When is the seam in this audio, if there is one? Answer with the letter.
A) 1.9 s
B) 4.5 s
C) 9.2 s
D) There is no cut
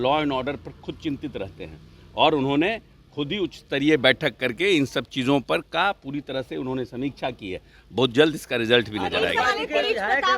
D